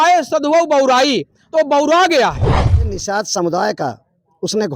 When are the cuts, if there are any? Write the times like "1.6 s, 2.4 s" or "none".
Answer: 2.7 s